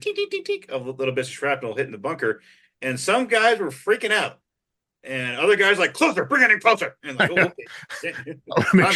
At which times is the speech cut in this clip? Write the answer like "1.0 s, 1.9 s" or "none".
none